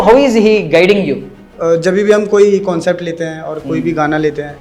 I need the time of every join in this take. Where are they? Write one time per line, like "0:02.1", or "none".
0:01.5